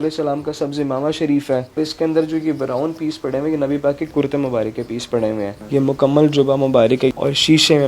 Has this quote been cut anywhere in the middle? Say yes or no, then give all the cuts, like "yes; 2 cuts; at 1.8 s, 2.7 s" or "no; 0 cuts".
yes; 4 cuts; at 1.8 s, 4.1 s, 5.5 s, 7.1 s